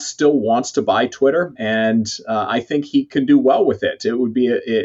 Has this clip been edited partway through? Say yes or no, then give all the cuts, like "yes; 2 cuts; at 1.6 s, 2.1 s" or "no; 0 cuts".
yes; 1 cut; at 1.6 s